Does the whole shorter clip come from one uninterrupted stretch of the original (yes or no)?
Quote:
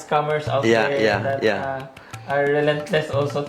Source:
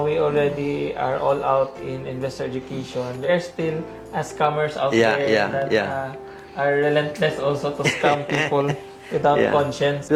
yes